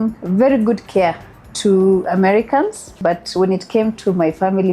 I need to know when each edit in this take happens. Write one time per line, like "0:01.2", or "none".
0:02.9